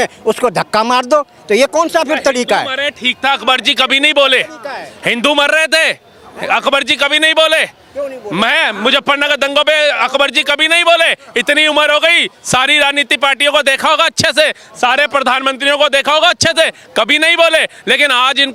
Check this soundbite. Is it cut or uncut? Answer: uncut